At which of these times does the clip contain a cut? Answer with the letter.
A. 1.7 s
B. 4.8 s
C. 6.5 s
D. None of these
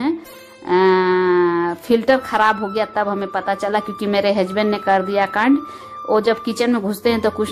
D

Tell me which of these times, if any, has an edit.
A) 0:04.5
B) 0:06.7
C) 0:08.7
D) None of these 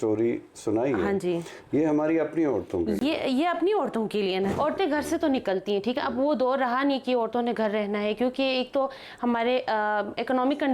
A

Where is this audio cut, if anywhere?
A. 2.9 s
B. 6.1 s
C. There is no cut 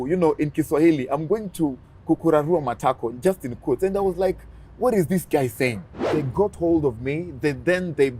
B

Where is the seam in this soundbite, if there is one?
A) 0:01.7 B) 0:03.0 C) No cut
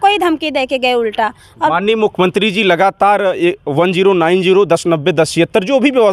A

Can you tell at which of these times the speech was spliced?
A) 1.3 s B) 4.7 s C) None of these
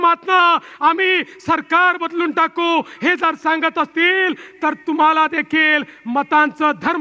C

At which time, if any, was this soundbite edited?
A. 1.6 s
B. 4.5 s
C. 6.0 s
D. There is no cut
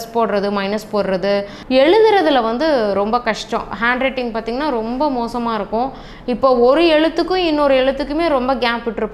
A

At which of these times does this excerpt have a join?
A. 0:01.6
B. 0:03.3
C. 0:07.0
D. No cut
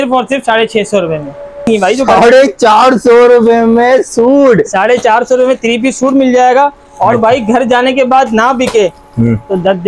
A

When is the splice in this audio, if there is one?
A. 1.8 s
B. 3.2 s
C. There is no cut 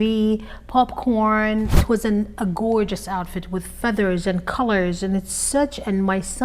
A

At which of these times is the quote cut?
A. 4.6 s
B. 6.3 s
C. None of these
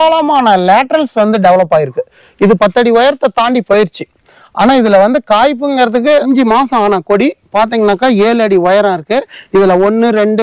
B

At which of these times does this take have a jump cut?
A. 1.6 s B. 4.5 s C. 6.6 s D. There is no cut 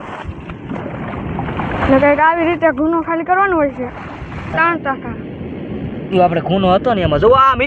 B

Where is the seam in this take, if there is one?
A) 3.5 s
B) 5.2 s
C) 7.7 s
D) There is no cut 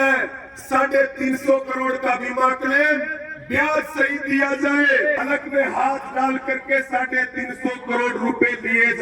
B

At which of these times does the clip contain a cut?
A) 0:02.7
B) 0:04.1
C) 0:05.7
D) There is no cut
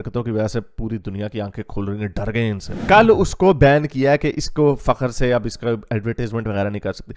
A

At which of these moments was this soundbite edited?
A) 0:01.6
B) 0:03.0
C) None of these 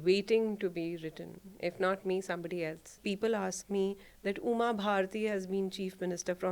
B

